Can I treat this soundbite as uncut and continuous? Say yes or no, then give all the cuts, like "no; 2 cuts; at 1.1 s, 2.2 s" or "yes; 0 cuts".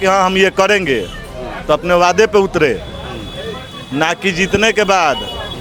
yes; 0 cuts